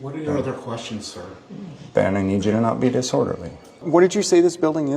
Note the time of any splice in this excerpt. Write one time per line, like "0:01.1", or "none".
0:03.8